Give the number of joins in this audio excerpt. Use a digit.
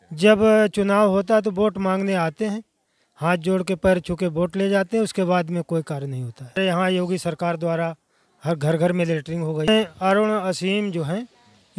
2